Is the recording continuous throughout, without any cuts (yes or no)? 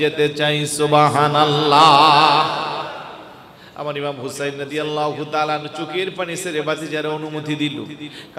yes